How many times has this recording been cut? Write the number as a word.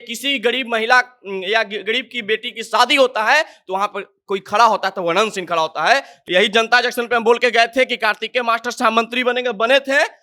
one